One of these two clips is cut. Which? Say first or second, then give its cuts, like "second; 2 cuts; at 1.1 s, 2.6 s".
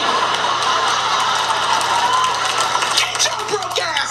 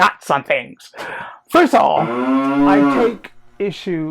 second; 2 cuts; at 2.1 s, 3.0 s